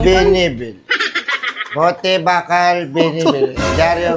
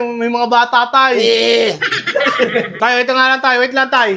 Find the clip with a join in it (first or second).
second